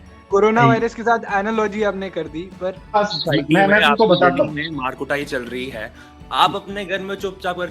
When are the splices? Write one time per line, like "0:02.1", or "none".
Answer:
0:03.0

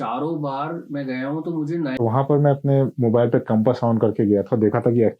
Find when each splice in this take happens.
0:01.9

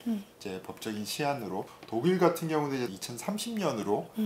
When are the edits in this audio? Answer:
0:01.8
0:02.9

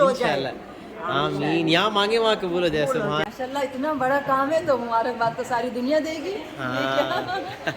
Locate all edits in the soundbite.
0:03.2

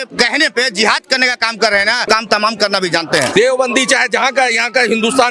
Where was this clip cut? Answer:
0:02.0
0:03.4

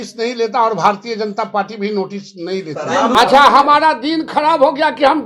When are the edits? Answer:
0:03.2

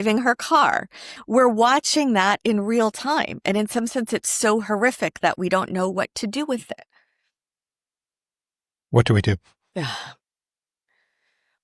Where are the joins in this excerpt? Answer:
0:01.1

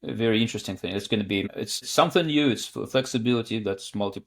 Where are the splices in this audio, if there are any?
0:01.5

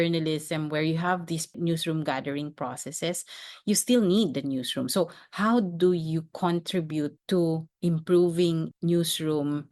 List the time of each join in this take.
0:01.5
0:07.2
0:08.7

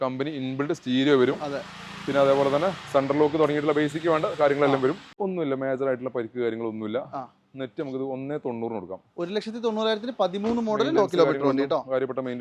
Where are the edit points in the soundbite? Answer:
0:05.1

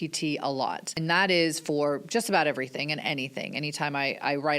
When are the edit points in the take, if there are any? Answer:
0:01.0

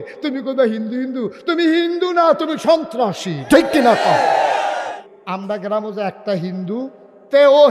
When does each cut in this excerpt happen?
0:05.1

